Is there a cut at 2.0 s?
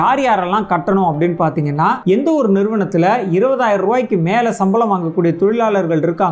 yes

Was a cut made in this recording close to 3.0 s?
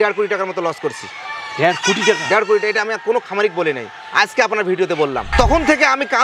no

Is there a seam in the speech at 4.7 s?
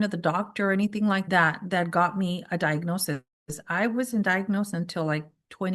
no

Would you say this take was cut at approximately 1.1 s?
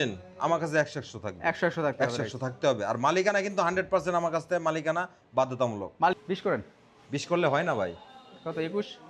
no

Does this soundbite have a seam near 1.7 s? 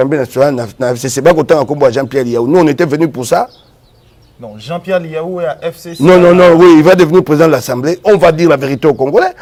no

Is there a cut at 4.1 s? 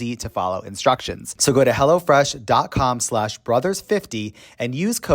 no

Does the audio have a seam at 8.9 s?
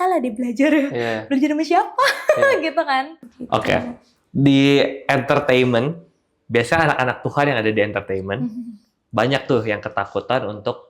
no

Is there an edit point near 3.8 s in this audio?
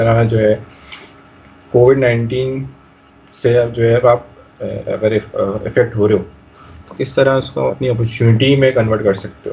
no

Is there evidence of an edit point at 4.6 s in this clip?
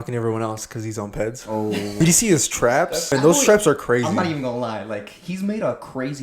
no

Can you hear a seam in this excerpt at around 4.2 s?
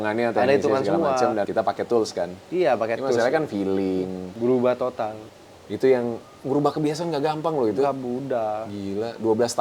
yes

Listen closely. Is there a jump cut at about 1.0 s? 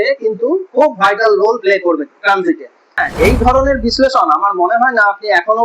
no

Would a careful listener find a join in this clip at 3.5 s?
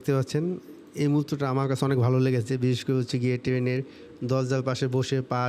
no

